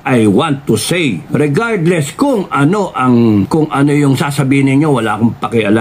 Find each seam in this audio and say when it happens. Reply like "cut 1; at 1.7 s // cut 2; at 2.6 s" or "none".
cut 1; at 1.2 s // cut 2; at 3.5 s